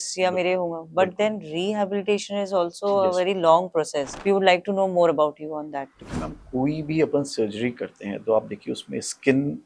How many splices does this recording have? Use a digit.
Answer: 1